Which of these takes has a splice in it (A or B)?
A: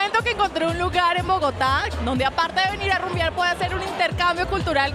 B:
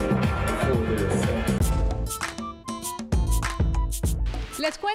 B